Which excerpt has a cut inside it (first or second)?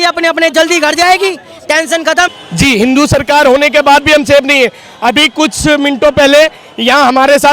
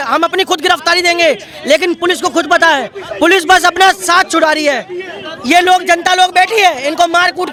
first